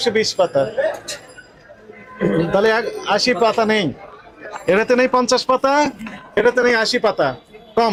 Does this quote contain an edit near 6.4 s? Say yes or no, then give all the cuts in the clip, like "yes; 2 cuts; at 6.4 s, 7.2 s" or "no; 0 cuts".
no; 0 cuts